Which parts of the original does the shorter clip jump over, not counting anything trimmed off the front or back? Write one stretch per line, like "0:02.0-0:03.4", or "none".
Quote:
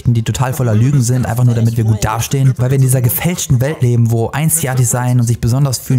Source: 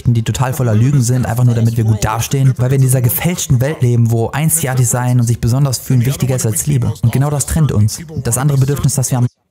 none